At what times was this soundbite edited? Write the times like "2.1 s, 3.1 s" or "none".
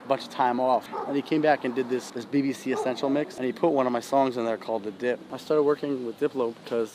1.0 s, 2.2 s, 3.3 s, 5.3 s